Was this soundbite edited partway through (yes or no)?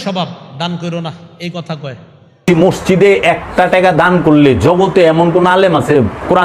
yes